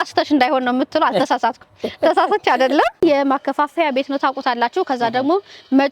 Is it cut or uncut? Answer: cut